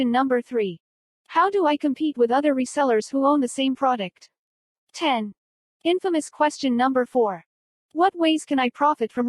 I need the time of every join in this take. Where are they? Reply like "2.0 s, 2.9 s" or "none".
5.1 s, 6.4 s